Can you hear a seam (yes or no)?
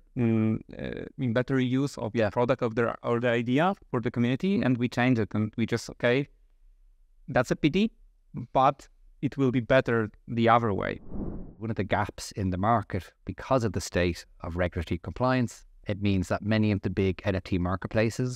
yes